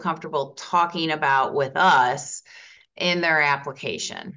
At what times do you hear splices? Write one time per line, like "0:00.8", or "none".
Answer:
none